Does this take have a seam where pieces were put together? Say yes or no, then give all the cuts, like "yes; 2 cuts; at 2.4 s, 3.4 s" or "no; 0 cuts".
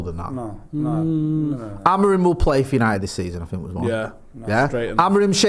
no; 0 cuts